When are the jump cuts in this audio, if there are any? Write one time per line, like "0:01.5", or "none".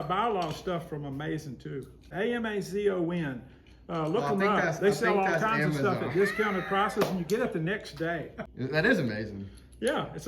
0:02.1
0:08.4